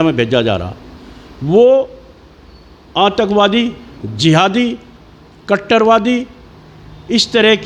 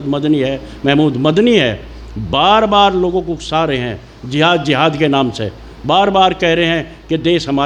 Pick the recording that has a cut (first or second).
first